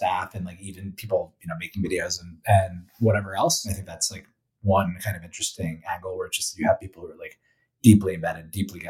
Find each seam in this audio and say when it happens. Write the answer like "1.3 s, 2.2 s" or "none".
3.7 s